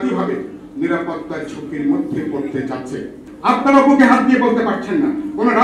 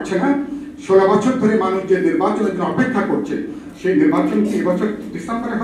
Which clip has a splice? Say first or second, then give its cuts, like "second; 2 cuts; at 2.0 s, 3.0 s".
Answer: first; 1 cut; at 3.2 s